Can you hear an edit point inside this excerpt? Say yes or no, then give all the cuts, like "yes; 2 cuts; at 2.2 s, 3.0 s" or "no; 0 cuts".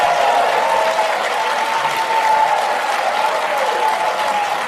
no; 0 cuts